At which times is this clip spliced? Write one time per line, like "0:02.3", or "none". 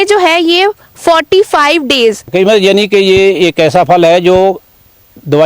0:02.3